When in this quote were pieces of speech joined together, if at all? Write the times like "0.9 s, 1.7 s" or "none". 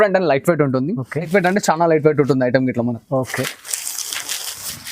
1.3 s